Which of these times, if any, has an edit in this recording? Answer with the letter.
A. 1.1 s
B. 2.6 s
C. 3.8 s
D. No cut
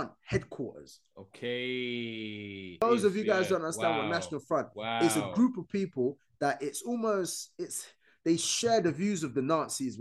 B